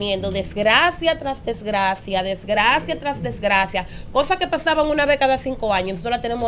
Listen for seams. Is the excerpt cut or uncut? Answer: uncut